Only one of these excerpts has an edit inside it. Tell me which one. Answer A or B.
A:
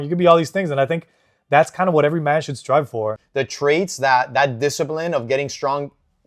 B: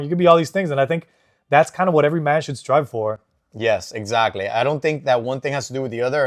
A